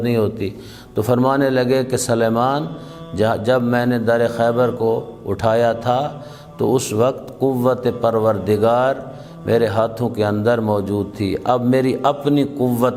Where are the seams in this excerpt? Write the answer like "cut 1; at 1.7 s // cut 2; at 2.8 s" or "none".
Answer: none

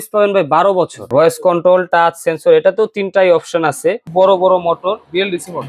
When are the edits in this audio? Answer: cut 1; at 1.1 s // cut 2; at 4.0 s

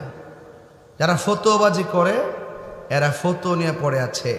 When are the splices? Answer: none

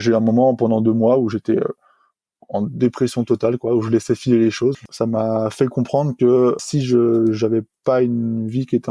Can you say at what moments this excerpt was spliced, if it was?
cut 1; at 4.8 s // cut 2; at 6.6 s

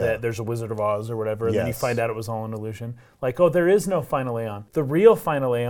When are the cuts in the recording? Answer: cut 1; at 4.6 s

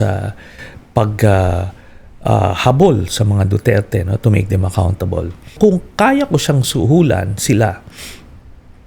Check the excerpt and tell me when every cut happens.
cut 1; at 5.6 s

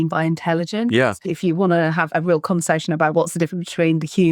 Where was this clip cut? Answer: cut 1; at 1.2 s

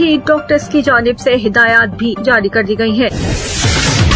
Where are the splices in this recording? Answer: cut 1; at 3.1 s

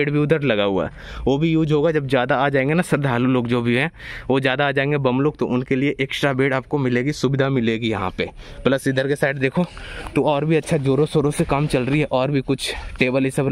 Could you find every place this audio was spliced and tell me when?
none

